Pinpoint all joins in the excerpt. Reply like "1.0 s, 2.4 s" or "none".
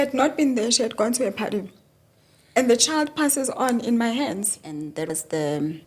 4.8 s